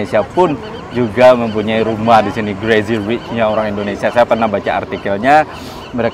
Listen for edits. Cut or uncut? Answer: uncut